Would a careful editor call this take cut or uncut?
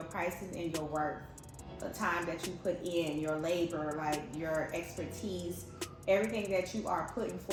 uncut